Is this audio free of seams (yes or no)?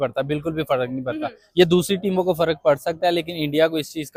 yes